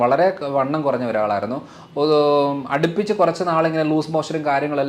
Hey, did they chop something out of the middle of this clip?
no; 0 cuts

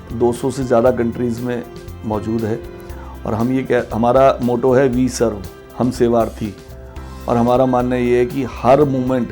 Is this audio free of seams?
yes; 0 cuts

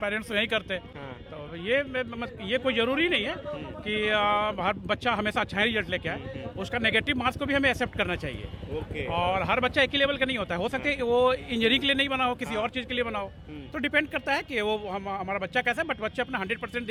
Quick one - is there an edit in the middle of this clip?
no; 0 cuts

